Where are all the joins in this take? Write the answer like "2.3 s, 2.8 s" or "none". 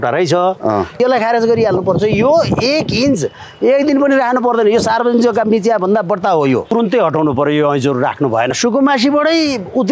1.0 s, 6.7 s, 8.5 s